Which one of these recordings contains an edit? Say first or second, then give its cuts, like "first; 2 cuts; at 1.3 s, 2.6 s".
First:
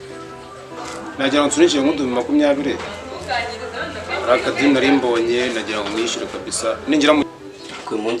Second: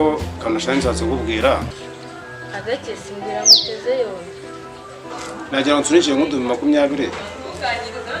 first; 1 cut; at 7.2 s